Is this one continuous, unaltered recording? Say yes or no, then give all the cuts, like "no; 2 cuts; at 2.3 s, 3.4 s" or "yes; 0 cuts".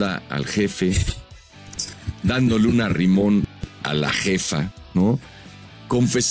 yes; 0 cuts